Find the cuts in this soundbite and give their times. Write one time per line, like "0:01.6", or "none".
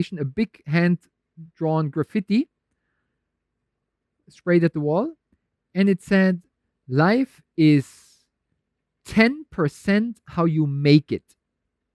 none